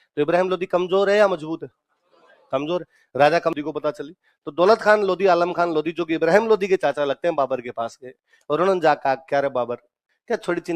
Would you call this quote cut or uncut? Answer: cut